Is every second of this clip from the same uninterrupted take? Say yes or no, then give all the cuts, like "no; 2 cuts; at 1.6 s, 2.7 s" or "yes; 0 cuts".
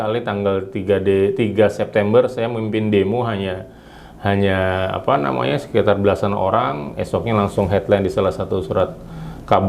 yes; 0 cuts